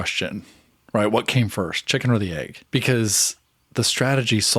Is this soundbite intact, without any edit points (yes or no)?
no